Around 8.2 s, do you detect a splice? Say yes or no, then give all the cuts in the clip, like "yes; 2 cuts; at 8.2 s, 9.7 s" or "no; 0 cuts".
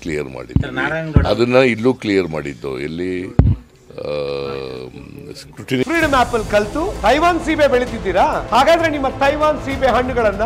no; 1 cut; at 5.8 s